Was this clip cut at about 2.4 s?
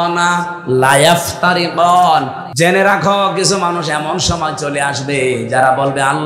yes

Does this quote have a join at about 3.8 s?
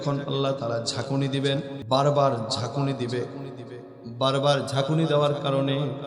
no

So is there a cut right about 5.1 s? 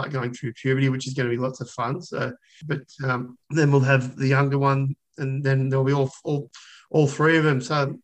no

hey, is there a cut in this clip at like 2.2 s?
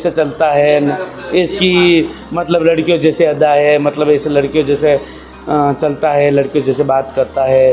no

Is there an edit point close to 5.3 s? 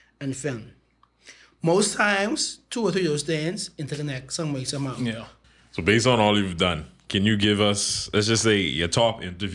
yes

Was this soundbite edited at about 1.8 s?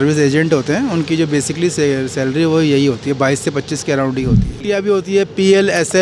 no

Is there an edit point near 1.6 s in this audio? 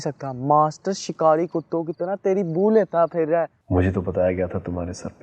no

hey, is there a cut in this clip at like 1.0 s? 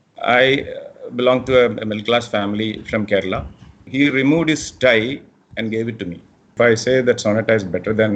no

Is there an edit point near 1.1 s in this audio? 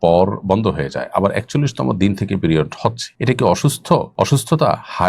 no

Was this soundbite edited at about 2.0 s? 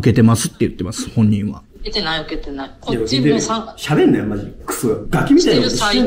no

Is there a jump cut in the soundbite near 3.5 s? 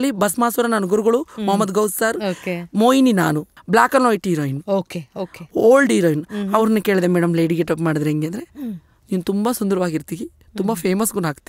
yes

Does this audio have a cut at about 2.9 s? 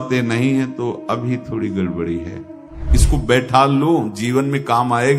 yes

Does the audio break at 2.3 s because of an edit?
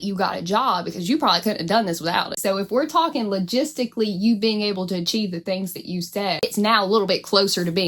yes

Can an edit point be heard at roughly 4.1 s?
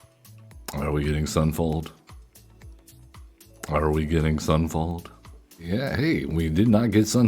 no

